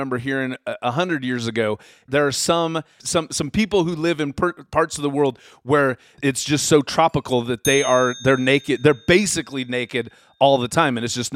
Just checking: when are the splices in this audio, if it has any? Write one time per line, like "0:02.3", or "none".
0:02.1
0:03.0
0:06.1